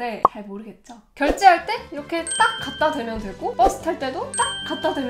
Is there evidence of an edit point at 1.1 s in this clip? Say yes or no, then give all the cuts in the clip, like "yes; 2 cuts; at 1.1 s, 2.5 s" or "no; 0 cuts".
yes; 1 cut; at 1.1 s